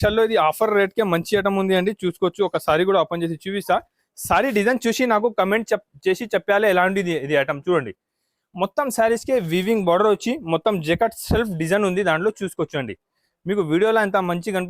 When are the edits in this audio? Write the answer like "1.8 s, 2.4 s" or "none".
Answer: none

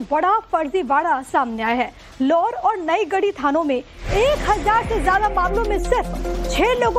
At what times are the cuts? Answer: 1.5 s

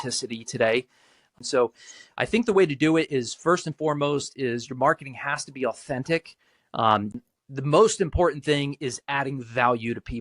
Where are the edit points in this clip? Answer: 1.2 s, 7.1 s

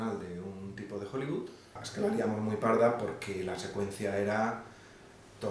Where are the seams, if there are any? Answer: 1.8 s

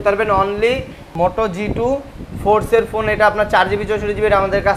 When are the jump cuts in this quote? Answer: 1.0 s

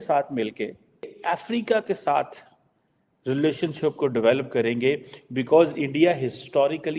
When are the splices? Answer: 1.1 s

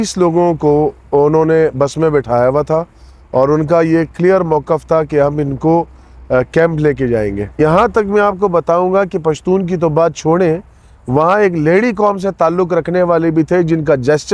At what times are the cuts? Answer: 7.6 s

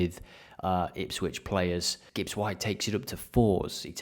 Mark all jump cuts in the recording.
2.0 s

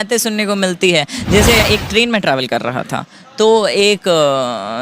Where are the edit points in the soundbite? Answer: 1.6 s

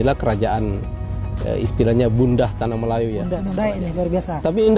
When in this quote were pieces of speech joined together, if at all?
3.5 s

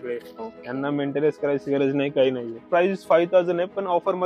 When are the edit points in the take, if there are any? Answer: 2.6 s

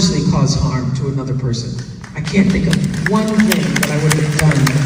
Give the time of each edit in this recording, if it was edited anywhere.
1.0 s

